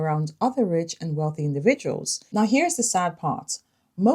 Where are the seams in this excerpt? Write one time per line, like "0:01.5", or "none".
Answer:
0:02.1